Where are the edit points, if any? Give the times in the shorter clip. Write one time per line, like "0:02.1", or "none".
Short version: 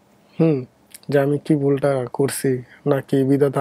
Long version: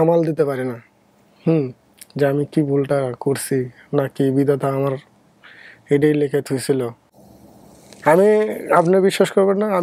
none